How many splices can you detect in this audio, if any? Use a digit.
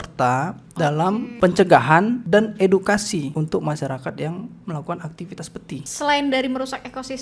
4